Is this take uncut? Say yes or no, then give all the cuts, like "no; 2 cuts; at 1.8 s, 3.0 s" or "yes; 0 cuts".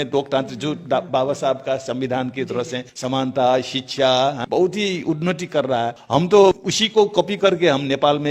no; 4 cuts; at 2.9 s, 4.4 s, 6.0 s, 6.7 s